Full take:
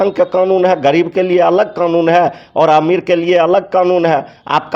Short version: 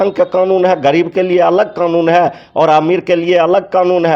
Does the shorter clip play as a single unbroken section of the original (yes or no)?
yes